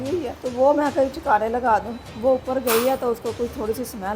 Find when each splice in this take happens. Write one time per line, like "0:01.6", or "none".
0:02.0

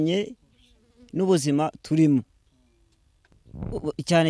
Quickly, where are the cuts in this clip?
0:03.3

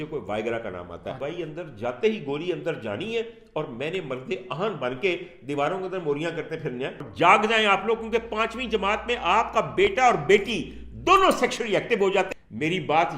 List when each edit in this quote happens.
0:01.2
0:07.0
0:12.3

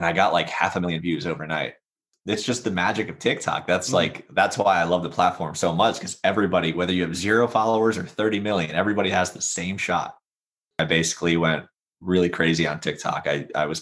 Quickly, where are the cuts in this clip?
0:02.1
0:10.8

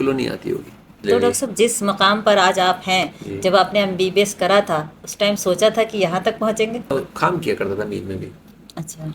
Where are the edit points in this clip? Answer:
0:00.9
0:06.9

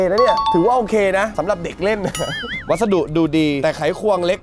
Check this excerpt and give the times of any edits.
0:02.4
0:03.6

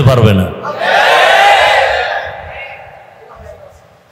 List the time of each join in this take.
none

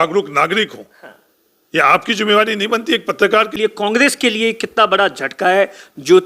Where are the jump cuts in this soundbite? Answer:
0:03.5

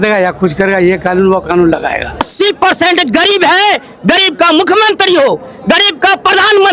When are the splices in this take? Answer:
0:02.2

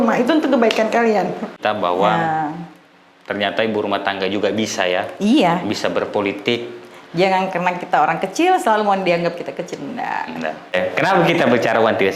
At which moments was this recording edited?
0:01.5
0:10.7

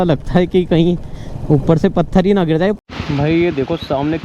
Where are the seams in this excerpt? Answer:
0:02.8

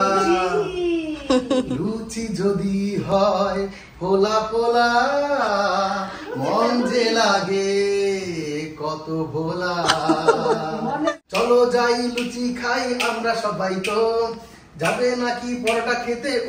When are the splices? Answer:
0:11.2

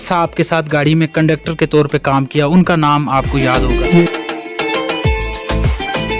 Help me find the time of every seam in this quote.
0:04.0

